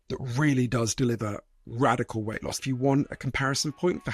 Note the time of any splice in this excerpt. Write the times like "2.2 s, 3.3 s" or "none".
2.6 s